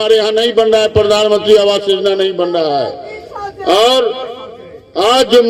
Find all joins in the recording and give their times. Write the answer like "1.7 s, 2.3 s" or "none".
none